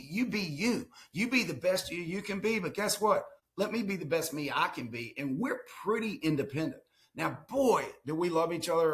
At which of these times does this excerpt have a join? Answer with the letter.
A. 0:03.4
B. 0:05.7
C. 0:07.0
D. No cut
A